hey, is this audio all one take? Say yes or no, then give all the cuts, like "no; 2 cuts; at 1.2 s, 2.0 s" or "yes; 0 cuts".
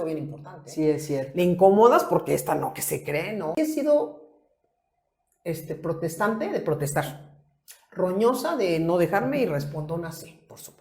no; 1 cut; at 3.6 s